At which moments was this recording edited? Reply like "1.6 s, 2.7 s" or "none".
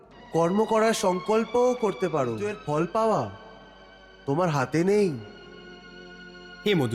2.5 s